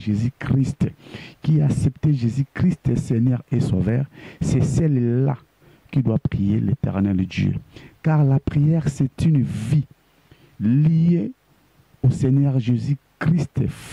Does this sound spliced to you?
no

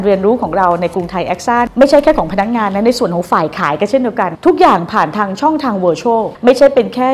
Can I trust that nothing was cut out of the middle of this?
yes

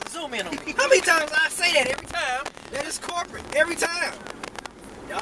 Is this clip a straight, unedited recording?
yes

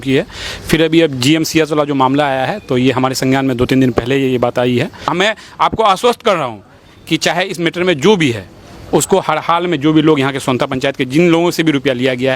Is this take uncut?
no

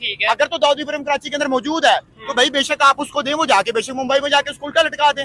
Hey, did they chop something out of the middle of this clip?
no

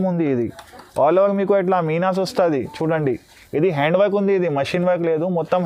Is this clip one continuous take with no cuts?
yes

